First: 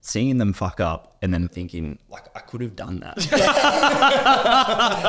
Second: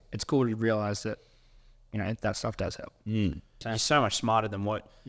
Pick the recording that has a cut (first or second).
second